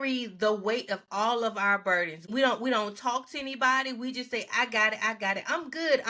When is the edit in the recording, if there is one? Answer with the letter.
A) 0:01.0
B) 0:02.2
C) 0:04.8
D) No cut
B